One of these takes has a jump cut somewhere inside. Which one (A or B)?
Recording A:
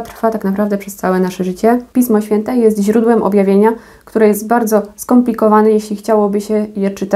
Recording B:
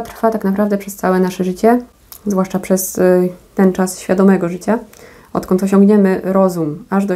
A